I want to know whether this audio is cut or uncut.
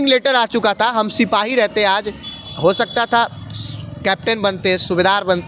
uncut